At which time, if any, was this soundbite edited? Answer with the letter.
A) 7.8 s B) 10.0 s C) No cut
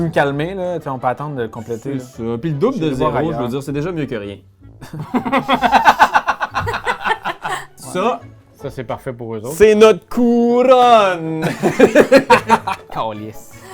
A